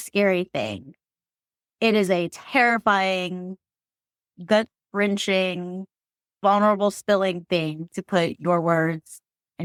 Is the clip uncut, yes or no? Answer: yes